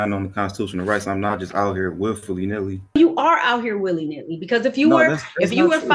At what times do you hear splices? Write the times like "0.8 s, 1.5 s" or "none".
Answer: 3.0 s